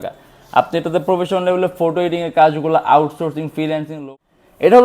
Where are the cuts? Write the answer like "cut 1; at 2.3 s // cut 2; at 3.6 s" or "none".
cut 1; at 3.9 s